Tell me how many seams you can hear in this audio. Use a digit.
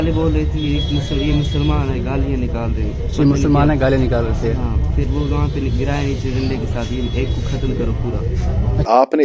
0